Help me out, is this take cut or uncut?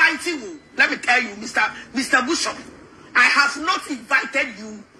uncut